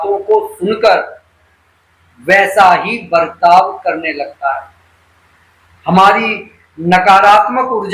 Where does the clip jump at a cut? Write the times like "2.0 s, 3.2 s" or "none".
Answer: none